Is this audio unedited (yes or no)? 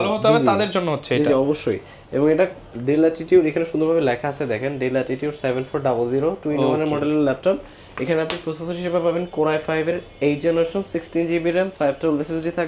yes